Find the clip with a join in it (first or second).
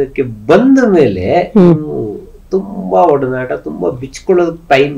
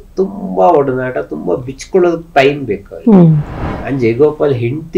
second